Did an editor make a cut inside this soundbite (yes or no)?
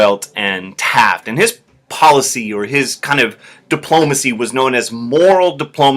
yes